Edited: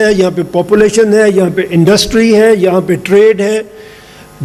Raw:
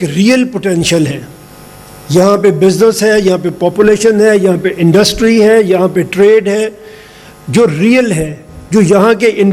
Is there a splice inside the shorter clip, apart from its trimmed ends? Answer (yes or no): no